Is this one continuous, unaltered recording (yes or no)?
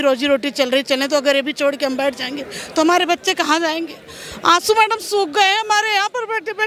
yes